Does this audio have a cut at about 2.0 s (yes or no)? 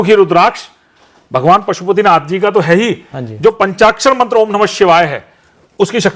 no